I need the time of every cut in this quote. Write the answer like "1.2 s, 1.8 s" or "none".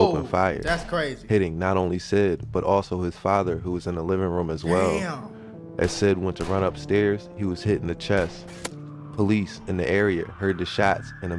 none